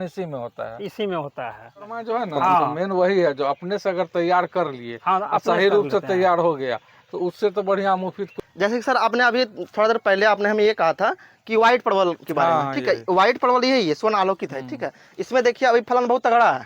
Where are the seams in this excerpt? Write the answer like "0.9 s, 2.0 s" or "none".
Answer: 2.0 s, 8.7 s